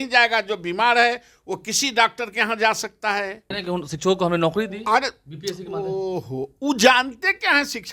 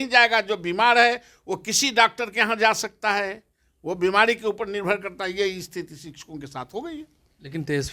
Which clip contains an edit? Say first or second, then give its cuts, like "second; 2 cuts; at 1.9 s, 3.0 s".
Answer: first; 1 cut; at 3.6 s